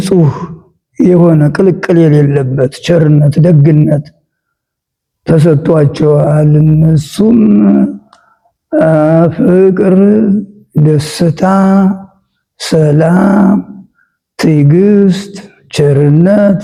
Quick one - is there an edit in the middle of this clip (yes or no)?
no